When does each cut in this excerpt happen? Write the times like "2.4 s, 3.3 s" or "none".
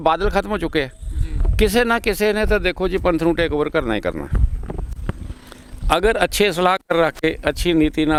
none